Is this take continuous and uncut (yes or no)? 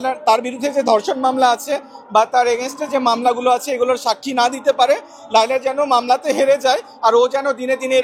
yes